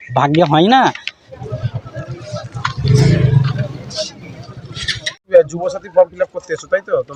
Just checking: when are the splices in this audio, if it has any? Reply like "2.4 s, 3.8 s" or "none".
none